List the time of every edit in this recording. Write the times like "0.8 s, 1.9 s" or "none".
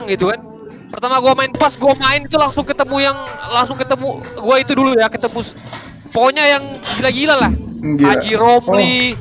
1.5 s

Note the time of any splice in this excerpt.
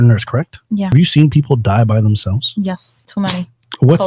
0.9 s, 2.9 s

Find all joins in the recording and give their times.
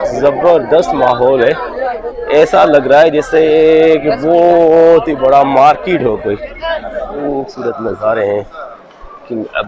7.1 s

